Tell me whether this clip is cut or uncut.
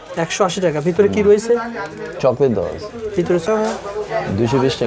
cut